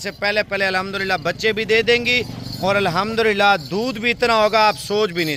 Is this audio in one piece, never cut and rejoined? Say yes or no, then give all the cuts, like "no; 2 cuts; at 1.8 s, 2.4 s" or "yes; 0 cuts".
yes; 0 cuts